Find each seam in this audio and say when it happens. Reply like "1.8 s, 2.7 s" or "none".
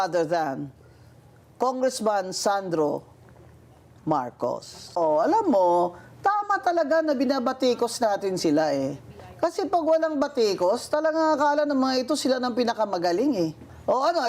5.0 s